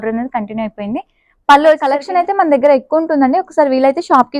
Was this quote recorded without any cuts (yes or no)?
no